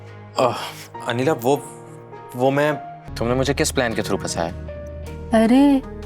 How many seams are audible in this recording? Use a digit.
1